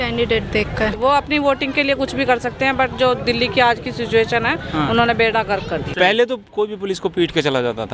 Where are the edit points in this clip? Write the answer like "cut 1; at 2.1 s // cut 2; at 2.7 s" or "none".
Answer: cut 1; at 1.0 s // cut 2; at 5.9 s